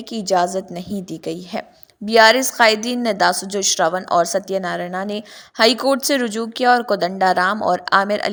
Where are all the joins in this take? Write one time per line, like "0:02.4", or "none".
none